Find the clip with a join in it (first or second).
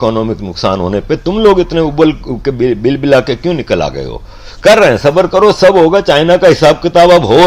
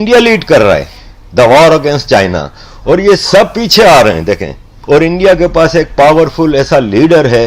second